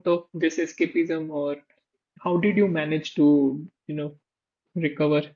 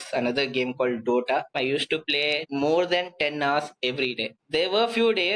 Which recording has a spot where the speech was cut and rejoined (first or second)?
second